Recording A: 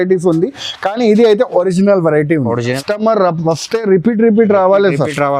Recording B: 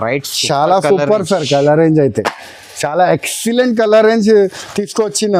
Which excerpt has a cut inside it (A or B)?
A